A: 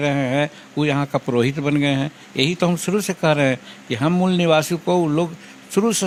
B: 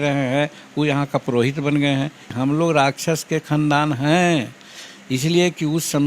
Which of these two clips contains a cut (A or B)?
B